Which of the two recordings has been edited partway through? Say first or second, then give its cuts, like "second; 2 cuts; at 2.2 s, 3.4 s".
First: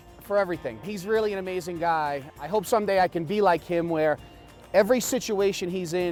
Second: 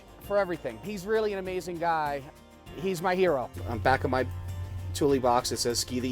second; 2 cuts; at 2.3 s, 3.6 s